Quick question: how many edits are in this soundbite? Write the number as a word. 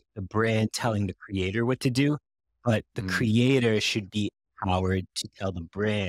zero